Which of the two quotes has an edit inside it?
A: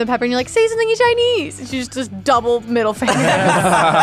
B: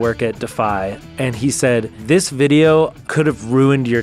B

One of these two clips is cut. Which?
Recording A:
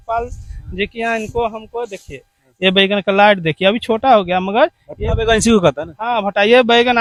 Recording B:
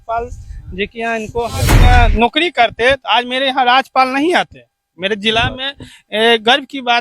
B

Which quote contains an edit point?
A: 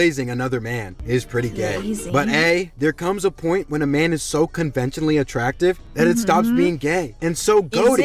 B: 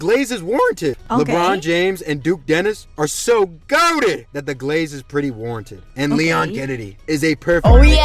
B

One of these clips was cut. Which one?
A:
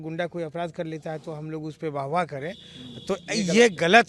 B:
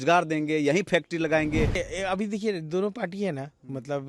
B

